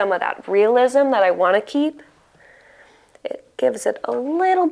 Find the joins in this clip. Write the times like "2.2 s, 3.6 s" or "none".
none